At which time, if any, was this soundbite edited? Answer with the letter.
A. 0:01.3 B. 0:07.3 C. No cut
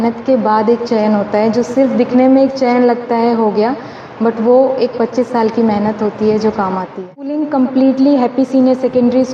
B